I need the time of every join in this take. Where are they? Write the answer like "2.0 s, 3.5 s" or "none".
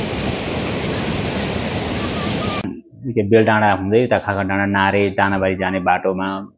2.6 s